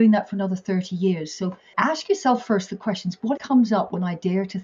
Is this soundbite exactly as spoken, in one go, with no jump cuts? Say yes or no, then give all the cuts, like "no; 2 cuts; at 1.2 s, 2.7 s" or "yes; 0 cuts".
no; 2 cuts; at 1.6 s, 3.4 s